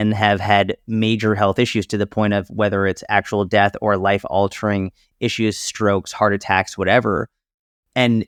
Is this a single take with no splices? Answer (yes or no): yes